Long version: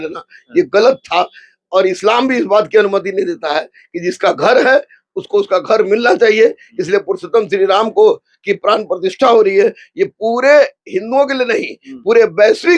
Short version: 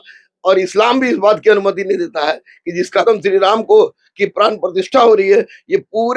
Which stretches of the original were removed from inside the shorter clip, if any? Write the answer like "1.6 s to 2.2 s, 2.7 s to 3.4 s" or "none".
4.3 s to 7.3 s